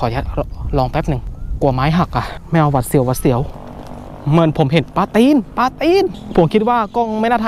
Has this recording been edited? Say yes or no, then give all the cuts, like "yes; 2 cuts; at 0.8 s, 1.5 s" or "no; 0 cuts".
yes; 4 cuts; at 1.3 s, 2.4 s, 3.5 s, 6.2 s